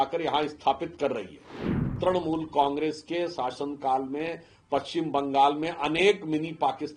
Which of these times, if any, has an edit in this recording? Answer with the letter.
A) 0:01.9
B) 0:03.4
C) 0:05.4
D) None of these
A